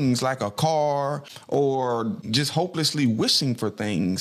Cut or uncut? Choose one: cut